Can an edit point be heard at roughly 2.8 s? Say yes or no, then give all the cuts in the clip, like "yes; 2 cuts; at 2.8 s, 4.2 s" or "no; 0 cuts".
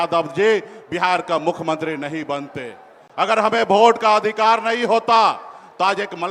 no; 0 cuts